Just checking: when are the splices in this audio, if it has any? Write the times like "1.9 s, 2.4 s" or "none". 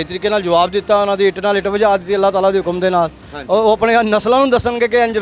none